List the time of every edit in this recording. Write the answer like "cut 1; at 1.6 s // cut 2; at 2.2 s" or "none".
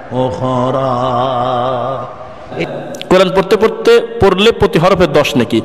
cut 1; at 2.5 s